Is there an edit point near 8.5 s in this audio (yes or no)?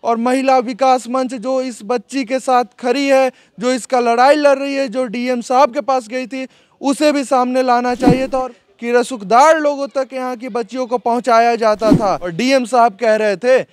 yes